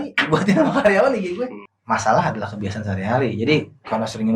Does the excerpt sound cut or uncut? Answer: cut